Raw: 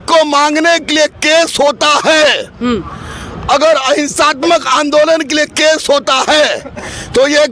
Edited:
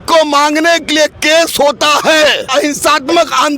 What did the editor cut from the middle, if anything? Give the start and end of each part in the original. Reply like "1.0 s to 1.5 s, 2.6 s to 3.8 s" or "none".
2.5 s to 3.8 s

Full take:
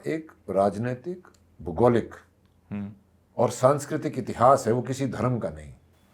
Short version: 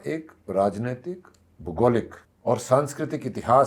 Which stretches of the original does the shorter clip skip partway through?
2.2 s to 3.2 s

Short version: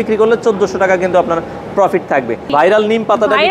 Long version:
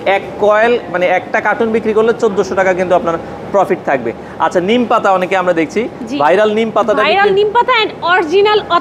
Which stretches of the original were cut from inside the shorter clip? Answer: 4.2 s to 6.1 s

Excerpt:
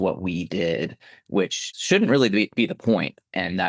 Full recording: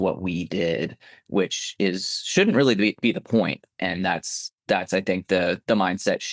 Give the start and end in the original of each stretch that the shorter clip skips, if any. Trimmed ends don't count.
1.6 s to 2.1 s

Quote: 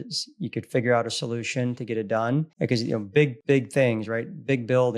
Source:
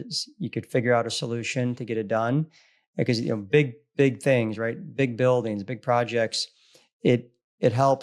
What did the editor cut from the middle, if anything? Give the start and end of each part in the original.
2.5 s to 2.9 s, 3.7 s to 3.9 s

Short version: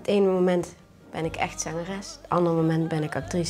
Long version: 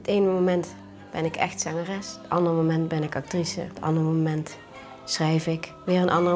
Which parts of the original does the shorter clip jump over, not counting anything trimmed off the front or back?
none

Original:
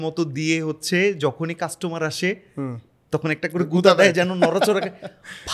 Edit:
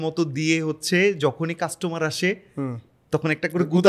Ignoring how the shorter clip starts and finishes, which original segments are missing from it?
none

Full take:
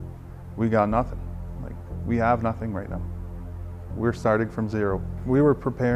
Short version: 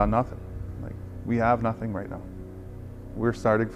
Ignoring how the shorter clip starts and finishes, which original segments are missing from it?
none

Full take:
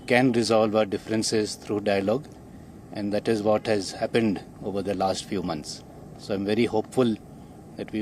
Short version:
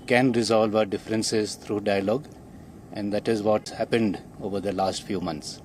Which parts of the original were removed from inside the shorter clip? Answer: 3.6 s to 3.9 s

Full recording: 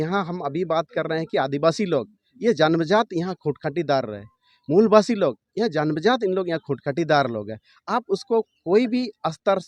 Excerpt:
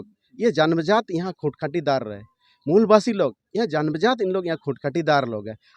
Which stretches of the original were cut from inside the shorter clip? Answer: none

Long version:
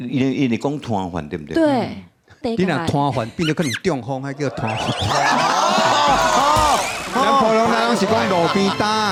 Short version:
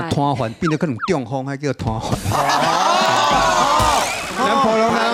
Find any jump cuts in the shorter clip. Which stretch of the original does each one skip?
none

